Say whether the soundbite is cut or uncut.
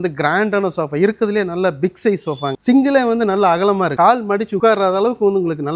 uncut